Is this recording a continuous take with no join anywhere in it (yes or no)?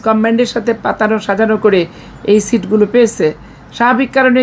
yes